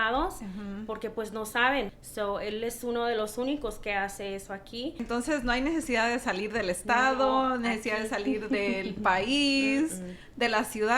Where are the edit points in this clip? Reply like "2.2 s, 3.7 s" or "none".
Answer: 1.9 s, 5.0 s